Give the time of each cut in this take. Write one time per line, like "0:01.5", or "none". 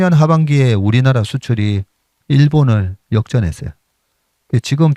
none